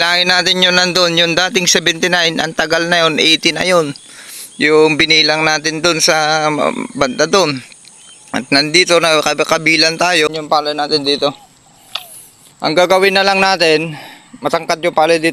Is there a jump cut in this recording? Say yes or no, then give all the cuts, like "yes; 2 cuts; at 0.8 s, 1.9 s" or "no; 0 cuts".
yes; 1 cut; at 10.3 s